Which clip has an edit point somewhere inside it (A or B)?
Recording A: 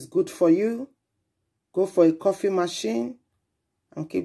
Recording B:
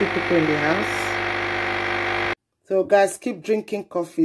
B